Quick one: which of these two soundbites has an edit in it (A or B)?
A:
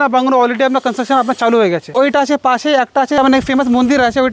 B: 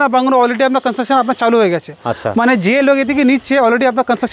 A